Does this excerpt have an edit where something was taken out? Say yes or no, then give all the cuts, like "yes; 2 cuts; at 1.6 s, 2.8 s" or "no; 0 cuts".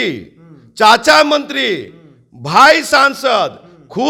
no; 0 cuts